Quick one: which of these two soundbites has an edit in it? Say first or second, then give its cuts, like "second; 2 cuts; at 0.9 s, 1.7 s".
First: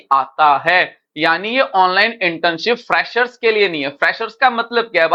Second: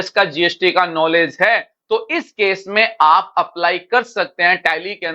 second; 1 cut; at 1.7 s